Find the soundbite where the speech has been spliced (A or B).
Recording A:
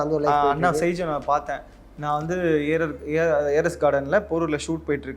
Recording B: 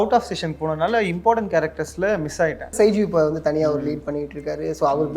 B